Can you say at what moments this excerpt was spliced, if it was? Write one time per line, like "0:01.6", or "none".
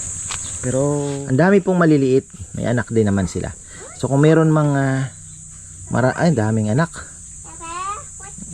0:01.2